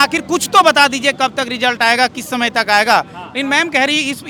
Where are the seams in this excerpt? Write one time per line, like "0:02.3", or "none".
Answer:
none